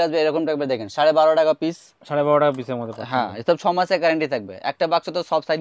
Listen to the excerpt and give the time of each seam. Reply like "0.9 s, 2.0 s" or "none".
none